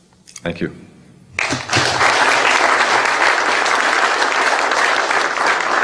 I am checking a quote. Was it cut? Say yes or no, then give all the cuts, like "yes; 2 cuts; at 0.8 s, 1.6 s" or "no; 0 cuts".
no; 0 cuts